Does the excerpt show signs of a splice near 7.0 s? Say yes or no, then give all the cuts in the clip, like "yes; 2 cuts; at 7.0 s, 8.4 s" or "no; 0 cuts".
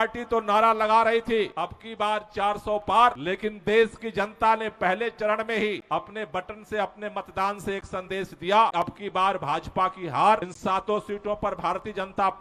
no; 5 cuts; at 1.5 s, 3.2 s, 5.8 s, 8.7 s, 10.5 s